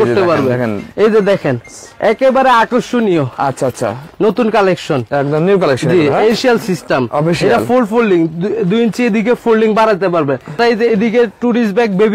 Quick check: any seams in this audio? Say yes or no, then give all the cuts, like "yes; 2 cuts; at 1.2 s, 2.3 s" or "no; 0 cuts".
yes; 2 cuts; at 6.3 s, 10.6 s